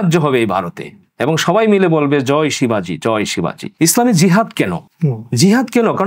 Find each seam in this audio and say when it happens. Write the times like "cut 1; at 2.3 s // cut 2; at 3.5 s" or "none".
cut 1; at 3.6 s